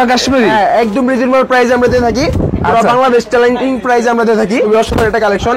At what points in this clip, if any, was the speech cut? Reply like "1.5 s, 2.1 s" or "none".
4.7 s